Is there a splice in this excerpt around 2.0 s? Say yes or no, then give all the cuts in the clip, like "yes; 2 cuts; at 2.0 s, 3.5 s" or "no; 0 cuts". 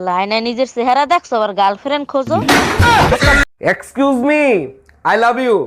no; 1 cut; at 3.5 s